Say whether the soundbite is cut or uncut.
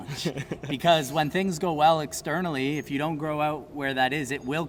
uncut